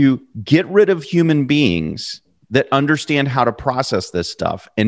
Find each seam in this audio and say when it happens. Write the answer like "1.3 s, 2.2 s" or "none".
none